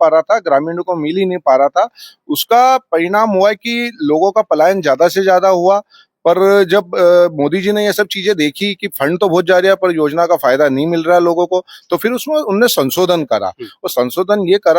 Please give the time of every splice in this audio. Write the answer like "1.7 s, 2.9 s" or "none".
none

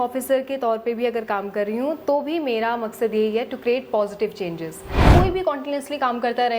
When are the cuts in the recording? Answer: 5.1 s

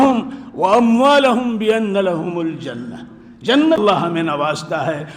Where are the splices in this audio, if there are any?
3.8 s

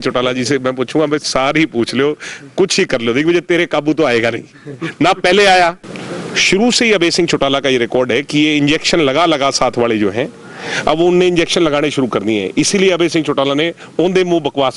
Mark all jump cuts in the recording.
5.9 s

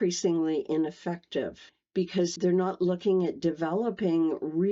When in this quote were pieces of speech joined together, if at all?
2.3 s

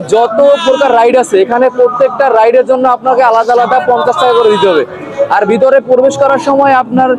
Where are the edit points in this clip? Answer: none

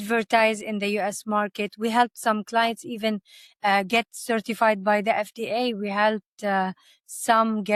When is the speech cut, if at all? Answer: none

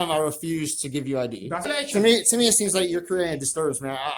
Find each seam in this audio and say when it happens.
1.7 s

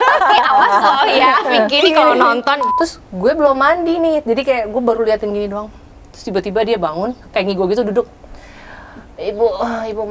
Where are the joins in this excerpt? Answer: 1.7 s, 2.7 s

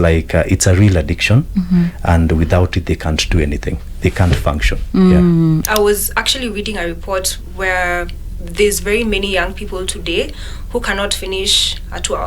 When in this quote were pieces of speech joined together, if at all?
5.6 s

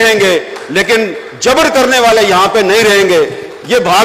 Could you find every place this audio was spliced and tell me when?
none

